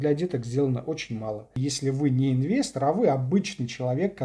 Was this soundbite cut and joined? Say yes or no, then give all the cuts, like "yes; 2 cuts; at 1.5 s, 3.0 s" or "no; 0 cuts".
yes; 1 cut; at 1.5 s